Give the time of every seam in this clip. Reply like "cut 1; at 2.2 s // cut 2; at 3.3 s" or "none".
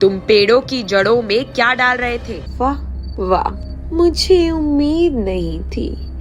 cut 1; at 2.4 s